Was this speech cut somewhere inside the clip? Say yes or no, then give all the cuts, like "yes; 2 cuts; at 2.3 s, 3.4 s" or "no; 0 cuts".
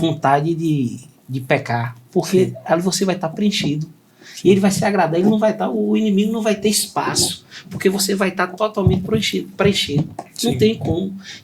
no; 0 cuts